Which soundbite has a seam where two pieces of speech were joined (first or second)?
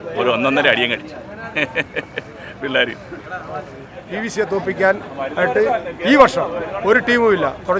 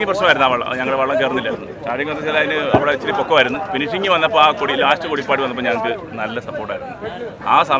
first